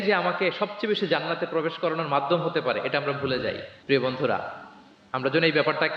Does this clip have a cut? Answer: no; 0 cuts

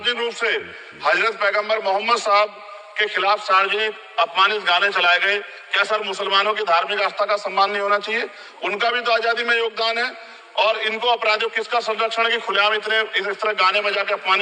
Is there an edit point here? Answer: no; 0 cuts

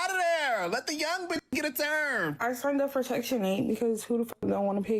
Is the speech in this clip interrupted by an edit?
yes; 1 cut; at 2.4 s

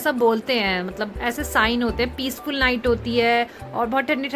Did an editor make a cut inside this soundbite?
no; 0 cuts

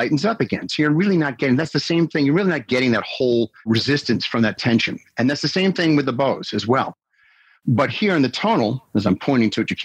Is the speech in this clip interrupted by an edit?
no; 0 cuts

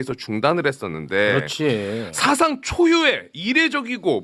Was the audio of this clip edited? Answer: no; 0 cuts

